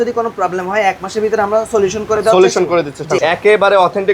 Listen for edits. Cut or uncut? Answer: cut